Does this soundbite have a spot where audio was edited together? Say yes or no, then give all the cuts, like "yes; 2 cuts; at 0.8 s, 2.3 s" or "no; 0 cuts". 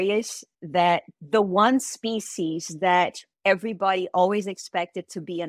yes; 1 cut; at 1.1 s